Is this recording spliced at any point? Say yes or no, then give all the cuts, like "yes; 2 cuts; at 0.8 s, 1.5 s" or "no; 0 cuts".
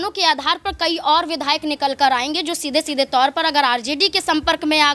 no; 0 cuts